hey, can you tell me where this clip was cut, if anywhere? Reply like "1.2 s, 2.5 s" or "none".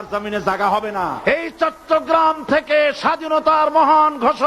1.2 s